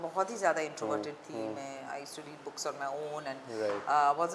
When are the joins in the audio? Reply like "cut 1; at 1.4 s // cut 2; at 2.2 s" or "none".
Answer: none